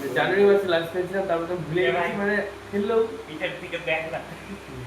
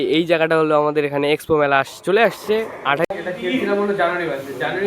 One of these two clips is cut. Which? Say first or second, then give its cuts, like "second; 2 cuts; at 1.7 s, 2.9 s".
second; 1 cut; at 3.1 s